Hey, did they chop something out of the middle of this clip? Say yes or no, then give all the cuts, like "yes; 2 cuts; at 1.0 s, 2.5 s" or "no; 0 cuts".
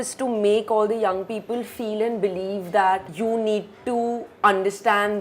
yes; 1 cut; at 3.1 s